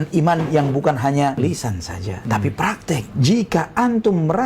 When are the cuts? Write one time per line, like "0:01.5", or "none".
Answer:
0:01.4
0:03.1